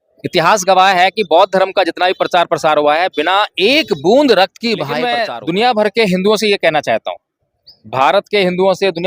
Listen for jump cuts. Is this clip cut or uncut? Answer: cut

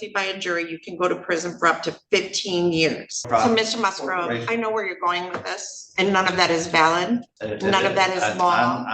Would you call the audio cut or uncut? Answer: cut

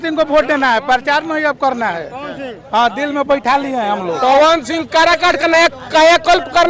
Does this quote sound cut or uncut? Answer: cut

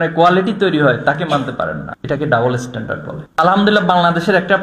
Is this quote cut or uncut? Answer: cut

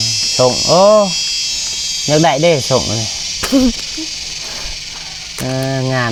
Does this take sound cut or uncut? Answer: uncut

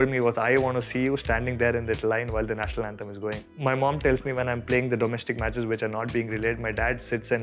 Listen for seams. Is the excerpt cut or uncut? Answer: cut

